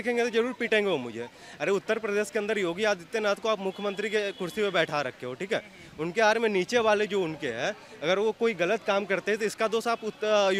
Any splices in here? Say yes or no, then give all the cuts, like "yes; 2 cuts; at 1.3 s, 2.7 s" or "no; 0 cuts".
no; 0 cuts